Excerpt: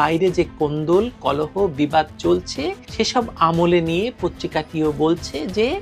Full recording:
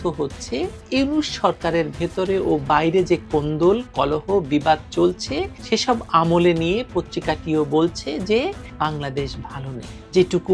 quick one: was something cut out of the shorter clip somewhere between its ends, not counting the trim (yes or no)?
no